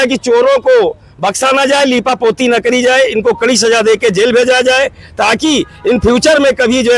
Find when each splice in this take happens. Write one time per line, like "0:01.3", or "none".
none